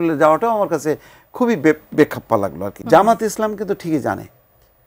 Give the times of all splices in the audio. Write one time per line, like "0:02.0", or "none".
0:02.7